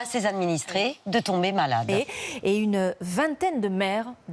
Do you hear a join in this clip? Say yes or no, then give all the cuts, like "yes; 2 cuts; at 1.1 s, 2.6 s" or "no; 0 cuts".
yes; 1 cut; at 1.9 s